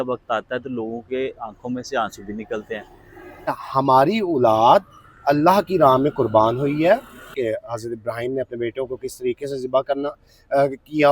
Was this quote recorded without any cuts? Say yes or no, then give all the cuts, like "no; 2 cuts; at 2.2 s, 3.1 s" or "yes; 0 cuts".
no; 2 cuts; at 3.5 s, 7.3 s